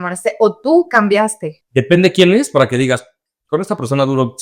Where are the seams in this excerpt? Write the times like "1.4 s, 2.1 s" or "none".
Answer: 1.6 s

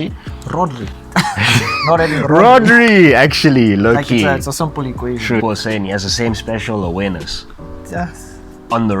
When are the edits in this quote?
5.4 s

